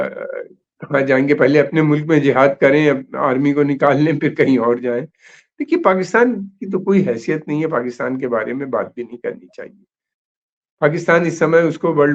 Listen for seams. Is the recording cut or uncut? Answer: uncut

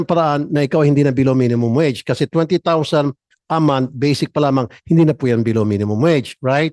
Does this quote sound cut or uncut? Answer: uncut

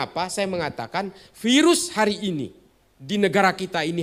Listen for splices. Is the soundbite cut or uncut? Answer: uncut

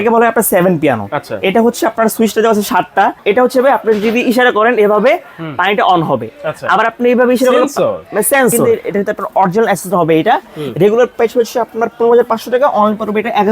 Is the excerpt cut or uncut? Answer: cut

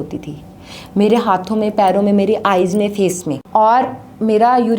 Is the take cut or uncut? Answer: cut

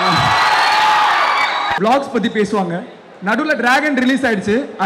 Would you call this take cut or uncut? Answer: cut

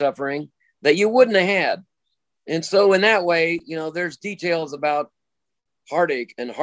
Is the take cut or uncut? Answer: uncut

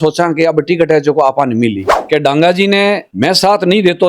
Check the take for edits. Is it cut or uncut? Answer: cut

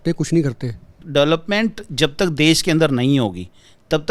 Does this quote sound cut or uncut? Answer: cut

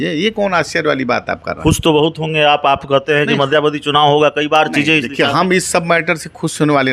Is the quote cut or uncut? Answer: uncut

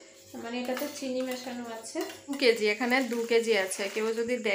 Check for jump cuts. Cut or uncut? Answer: cut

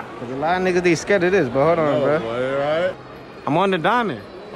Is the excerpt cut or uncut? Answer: cut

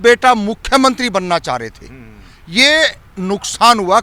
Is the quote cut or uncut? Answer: uncut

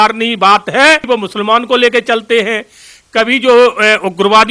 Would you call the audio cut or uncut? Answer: cut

